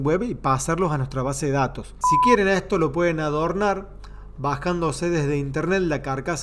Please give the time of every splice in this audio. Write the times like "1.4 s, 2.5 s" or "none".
1.9 s